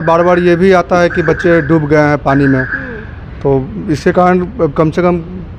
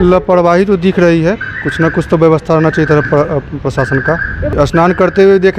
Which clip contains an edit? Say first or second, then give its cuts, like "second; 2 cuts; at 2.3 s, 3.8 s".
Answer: second; 1 cut; at 4.5 s